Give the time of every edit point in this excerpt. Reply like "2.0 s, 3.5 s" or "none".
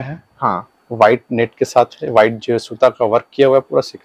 none